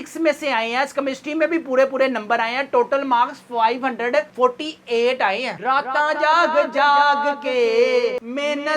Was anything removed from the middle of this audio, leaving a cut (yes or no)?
yes